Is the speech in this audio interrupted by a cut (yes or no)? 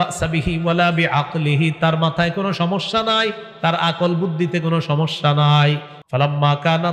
yes